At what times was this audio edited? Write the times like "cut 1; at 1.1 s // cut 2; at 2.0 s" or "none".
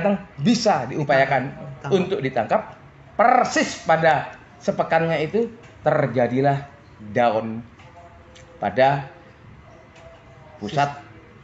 none